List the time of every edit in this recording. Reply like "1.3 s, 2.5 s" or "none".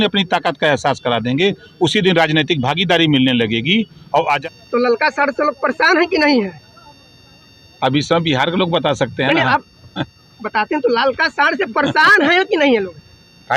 4.4 s